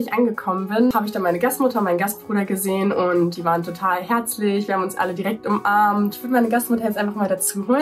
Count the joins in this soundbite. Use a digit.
2